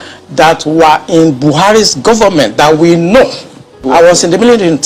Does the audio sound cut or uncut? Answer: cut